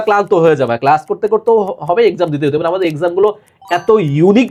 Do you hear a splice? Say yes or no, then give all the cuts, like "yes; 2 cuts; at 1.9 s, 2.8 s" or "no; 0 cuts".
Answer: no; 0 cuts